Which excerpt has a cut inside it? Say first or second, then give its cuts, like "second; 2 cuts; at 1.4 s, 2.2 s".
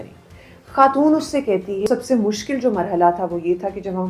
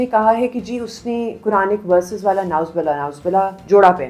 first; 1 cut; at 1.9 s